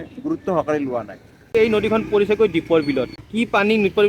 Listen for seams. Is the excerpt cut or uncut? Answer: cut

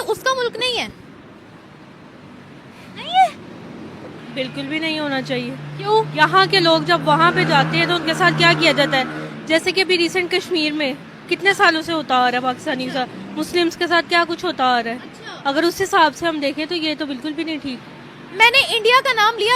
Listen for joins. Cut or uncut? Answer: uncut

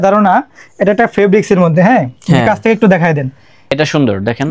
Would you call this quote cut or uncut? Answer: cut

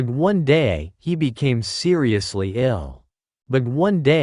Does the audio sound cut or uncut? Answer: uncut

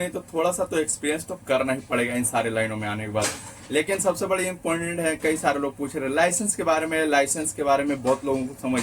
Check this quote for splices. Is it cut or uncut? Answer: uncut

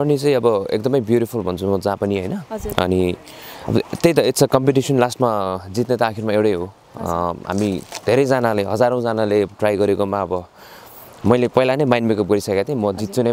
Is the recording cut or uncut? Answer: uncut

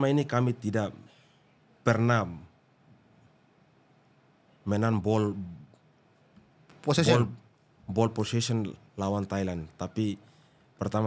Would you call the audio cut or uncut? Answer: uncut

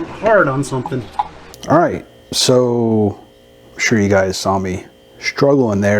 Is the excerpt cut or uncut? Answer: uncut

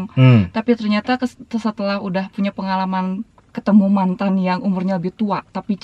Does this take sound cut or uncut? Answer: uncut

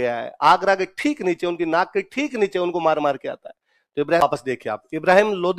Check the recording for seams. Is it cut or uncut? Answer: cut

